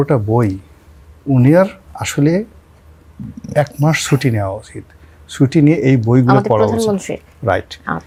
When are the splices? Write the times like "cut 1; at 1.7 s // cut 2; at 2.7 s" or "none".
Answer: none